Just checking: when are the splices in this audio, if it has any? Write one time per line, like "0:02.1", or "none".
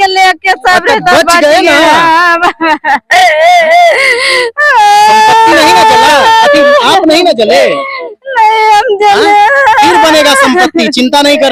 none

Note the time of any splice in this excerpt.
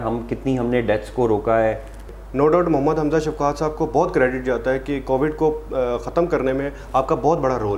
0:02.1

